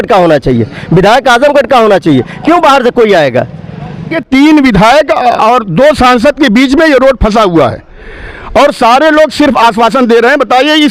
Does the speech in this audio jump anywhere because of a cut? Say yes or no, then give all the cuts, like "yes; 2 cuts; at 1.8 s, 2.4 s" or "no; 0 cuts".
yes; 1 cut; at 4.2 s